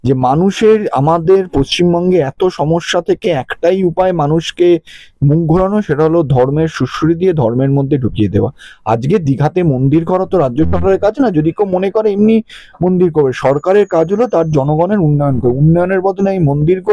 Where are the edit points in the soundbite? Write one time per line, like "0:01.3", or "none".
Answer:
none